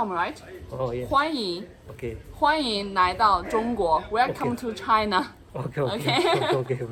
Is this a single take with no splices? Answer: yes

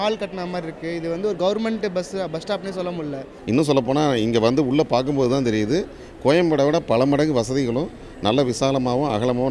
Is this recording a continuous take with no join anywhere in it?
no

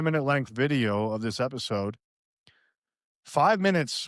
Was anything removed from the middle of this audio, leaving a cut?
no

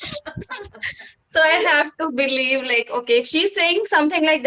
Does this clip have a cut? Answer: no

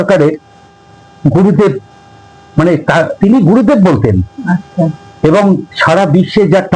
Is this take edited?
no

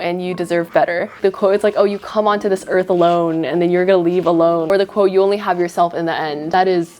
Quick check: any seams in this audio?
yes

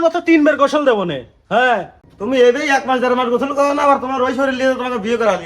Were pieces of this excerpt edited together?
yes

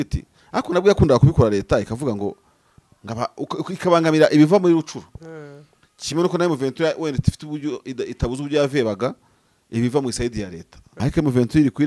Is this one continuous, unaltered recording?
no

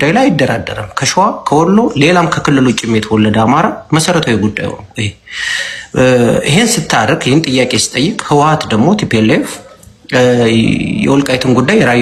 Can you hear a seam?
no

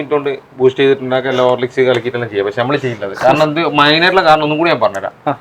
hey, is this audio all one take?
yes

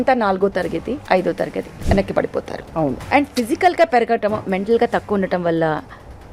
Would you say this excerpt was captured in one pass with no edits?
no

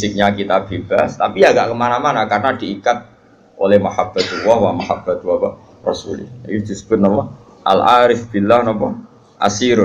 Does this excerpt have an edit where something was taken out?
no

